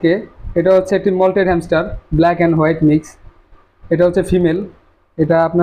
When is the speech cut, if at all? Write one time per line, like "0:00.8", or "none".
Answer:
none